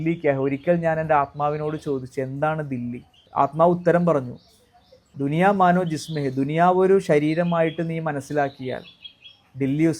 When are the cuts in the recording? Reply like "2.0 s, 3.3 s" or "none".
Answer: 3.2 s, 5.1 s